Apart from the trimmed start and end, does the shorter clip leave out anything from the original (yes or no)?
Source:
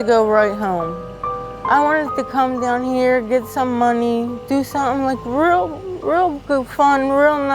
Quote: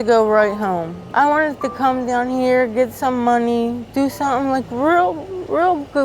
yes